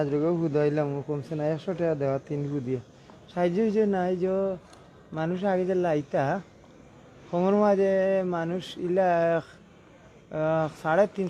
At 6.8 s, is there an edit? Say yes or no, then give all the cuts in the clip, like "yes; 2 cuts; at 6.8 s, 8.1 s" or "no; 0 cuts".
no; 0 cuts